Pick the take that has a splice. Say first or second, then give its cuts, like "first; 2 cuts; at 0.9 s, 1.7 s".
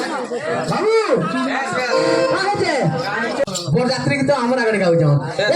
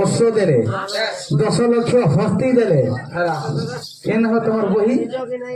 first; 1 cut; at 3.5 s